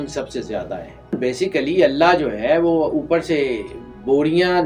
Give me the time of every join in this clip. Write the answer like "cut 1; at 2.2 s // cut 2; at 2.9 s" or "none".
cut 1; at 1.1 s

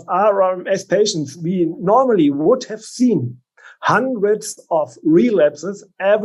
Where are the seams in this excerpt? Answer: none

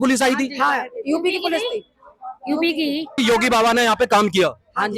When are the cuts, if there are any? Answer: cut 1; at 3.1 s

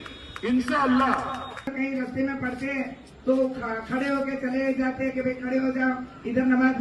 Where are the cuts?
cut 1; at 1.7 s

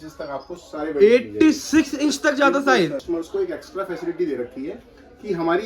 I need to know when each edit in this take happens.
cut 1; at 3.0 s

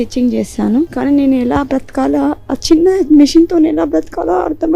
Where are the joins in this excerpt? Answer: cut 1; at 0.9 s

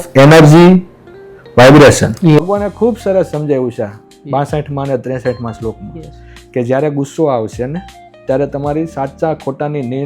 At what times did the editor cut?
cut 1; at 2.5 s

